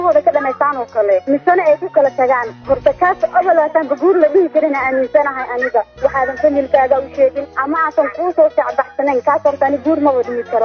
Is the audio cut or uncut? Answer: cut